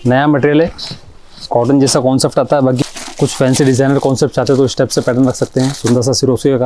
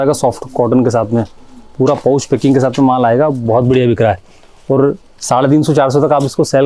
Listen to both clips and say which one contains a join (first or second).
first